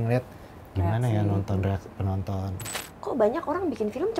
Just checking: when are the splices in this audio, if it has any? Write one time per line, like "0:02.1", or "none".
0:02.6